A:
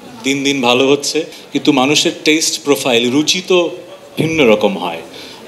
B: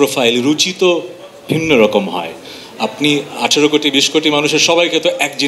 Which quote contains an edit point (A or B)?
A